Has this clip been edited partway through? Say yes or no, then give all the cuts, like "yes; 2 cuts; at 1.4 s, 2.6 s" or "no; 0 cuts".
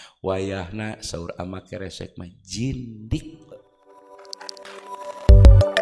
yes; 1 cut; at 3.4 s